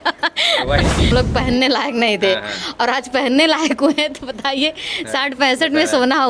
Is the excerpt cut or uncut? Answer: cut